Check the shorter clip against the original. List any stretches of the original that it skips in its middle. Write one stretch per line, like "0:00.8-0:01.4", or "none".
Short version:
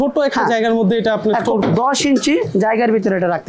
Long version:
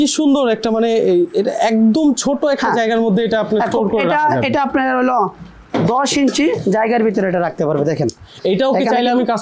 0:03.9-0:05.7